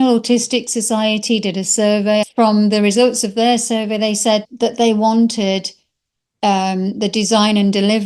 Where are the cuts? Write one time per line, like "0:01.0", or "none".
0:02.3
0:04.5